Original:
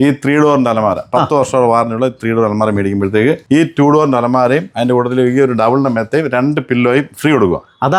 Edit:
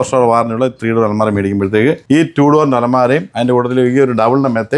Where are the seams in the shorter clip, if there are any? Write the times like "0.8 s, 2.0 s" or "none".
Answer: none